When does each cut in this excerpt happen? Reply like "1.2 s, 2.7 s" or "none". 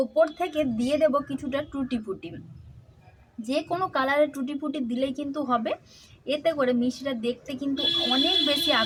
none